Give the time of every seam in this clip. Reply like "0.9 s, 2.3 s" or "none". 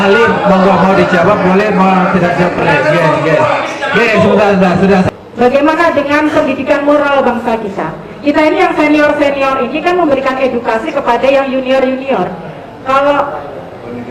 5.1 s